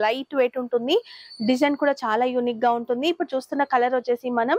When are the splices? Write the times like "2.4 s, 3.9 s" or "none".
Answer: none